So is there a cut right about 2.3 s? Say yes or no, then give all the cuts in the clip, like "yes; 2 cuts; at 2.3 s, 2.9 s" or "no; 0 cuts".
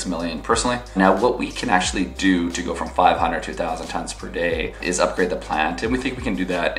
no; 2 cuts; at 1.0 s, 4.8 s